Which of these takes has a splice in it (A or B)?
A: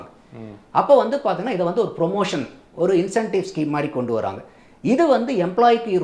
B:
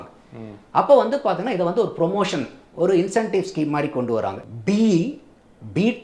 B